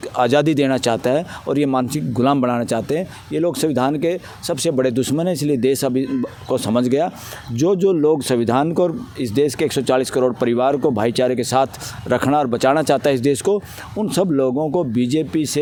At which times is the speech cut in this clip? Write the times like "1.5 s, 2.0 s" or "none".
none